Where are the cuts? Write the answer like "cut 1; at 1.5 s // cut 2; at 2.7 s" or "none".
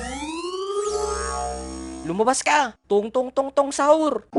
none